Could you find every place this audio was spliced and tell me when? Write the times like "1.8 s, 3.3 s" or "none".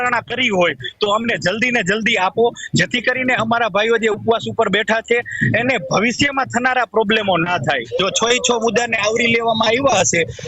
7.8 s